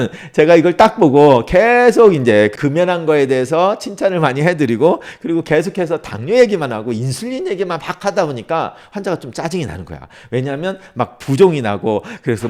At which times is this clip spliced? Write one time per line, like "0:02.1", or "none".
none